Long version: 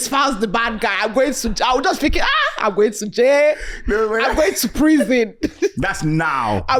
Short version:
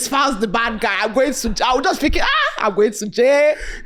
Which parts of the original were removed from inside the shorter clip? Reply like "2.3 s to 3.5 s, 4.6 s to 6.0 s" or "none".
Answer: none